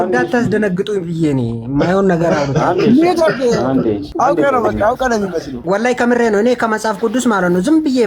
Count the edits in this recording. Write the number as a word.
two